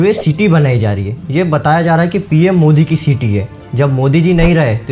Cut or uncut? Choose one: uncut